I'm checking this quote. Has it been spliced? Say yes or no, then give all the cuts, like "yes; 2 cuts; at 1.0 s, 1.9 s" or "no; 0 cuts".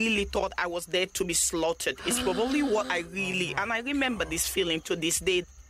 no; 0 cuts